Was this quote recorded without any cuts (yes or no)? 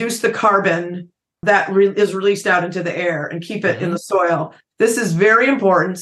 no